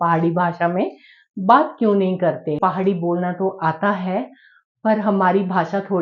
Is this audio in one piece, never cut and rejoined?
no; 1 cut; at 2.6 s

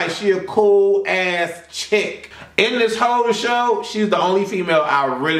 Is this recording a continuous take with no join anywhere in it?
yes; 0 cuts

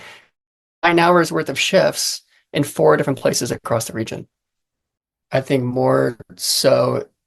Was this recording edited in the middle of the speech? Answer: yes; 1 cut; at 5.0 s

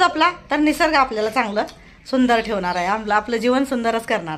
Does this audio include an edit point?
no; 0 cuts

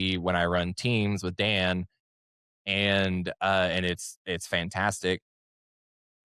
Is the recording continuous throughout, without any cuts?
yes; 0 cuts

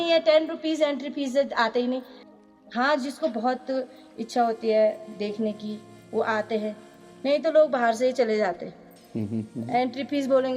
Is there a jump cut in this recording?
yes; 1 cut; at 2.4 s

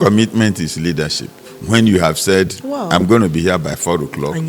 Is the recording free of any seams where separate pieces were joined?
yes; 0 cuts

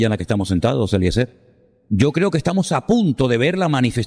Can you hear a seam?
yes; 1 cut; at 1.9 s

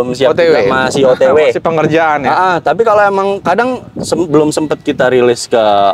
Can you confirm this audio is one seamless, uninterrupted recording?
yes; 0 cuts

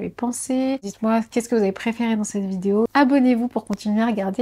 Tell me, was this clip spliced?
yes; 2 cuts; at 0.9 s, 2.9 s

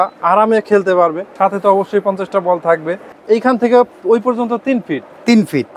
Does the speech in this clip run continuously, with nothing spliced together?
no; 2 cuts; at 1.2 s, 3.0 s

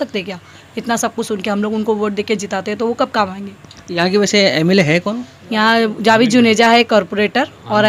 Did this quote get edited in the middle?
no; 0 cuts

